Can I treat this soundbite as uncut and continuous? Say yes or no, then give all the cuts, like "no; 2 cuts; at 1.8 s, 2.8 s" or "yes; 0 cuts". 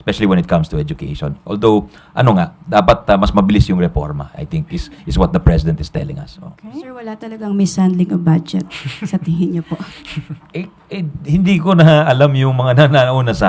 no; 1 cut; at 6.6 s